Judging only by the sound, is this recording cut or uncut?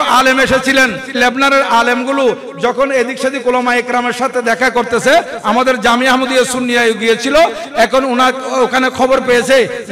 cut